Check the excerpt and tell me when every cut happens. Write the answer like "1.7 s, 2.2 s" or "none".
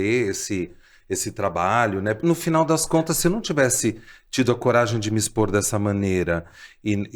2.2 s